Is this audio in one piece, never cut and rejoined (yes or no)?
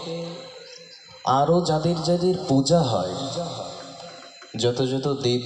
yes